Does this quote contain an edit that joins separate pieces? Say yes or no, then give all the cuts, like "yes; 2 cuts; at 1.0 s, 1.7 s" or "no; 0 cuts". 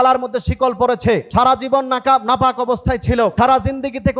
yes; 2 cuts; at 1.3 s, 3.3 s